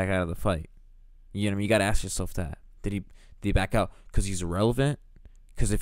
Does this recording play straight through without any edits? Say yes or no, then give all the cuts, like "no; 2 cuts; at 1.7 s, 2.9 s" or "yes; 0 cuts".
yes; 0 cuts